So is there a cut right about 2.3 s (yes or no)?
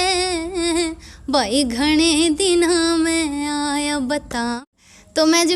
no